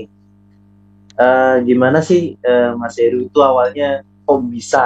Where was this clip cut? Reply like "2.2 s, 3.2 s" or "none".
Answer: none